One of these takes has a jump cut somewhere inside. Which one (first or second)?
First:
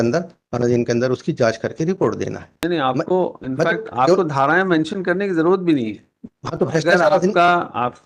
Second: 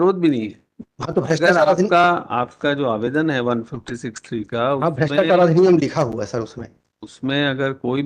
first